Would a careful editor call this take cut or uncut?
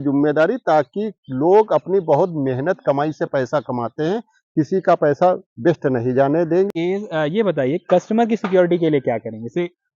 cut